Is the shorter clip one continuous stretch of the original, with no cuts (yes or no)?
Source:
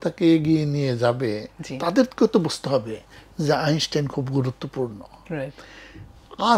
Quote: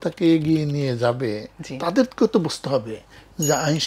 yes